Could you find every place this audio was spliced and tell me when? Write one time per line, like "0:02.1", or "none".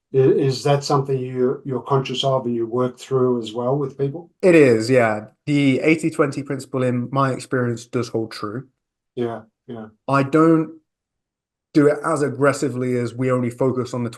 0:04.2